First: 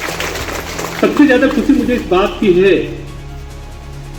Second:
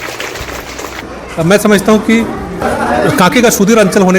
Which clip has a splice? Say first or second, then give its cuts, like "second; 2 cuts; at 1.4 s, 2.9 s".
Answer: second; 1 cut; at 1.0 s